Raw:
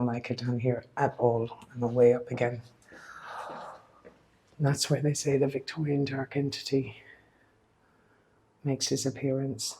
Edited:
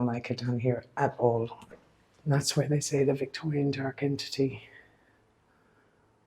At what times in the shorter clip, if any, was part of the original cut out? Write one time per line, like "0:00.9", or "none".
0:01.6